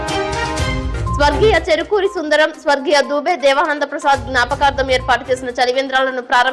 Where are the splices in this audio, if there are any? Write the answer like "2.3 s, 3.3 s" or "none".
1.2 s